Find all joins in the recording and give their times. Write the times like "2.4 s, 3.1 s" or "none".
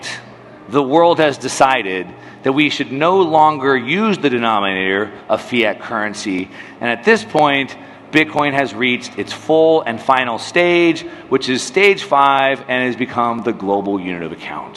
none